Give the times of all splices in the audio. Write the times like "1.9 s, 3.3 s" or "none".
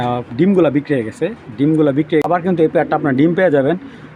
2.1 s